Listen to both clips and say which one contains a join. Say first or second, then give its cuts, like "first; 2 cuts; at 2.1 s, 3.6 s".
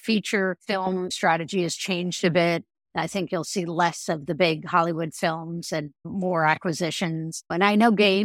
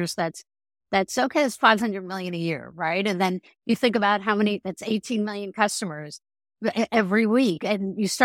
first; 3 cuts; at 1.0 s, 6.1 s, 7.5 s